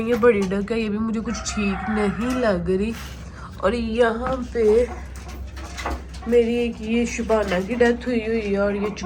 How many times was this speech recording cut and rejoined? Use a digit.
0